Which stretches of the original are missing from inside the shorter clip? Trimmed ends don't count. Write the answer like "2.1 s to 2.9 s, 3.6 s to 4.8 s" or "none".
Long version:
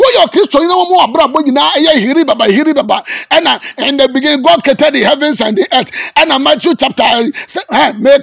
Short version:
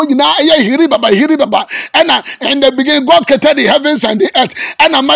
none